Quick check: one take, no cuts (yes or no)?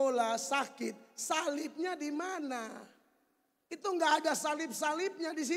yes